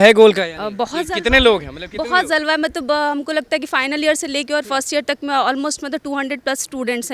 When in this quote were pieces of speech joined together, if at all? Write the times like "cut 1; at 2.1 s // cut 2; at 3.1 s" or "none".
none